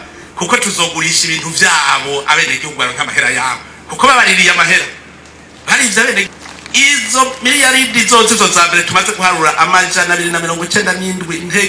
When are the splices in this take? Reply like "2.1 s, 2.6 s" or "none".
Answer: none